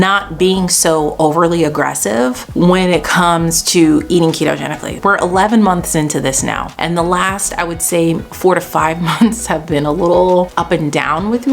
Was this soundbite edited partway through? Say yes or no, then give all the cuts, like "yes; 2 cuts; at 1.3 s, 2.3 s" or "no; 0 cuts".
yes; 4 cuts; at 2.4 s, 4.9 s, 6.7 s, 10.6 s